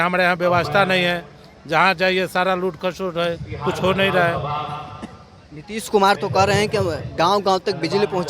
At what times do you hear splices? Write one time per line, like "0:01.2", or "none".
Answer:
none